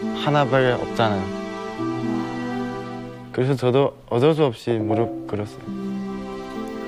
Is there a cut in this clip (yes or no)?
no